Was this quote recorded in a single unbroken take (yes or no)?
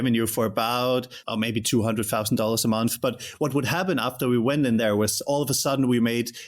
no